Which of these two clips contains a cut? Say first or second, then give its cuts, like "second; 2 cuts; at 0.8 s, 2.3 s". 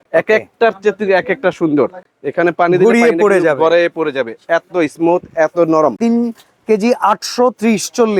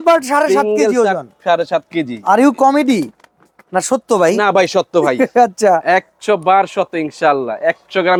first; 2 cuts; at 2.1 s, 6.0 s